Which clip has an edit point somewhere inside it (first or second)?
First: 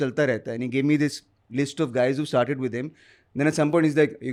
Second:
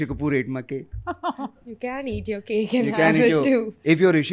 second